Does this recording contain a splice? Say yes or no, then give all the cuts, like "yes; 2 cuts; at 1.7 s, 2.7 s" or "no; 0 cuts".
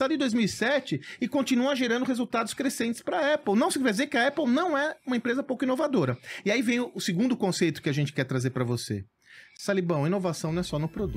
no; 0 cuts